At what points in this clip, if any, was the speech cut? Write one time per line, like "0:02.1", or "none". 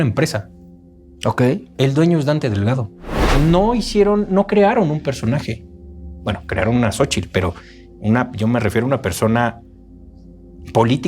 0:03.2